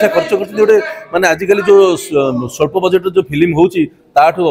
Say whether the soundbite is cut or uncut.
uncut